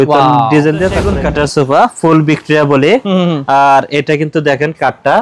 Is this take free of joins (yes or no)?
no